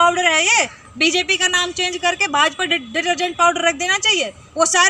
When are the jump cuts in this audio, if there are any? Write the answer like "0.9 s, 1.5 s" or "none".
none